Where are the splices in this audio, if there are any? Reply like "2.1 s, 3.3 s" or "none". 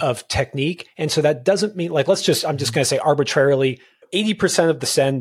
4.1 s